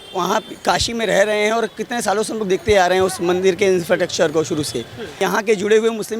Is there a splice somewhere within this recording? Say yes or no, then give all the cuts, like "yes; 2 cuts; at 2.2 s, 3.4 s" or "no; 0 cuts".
yes; 1 cut; at 5.1 s